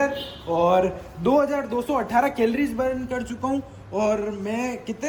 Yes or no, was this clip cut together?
no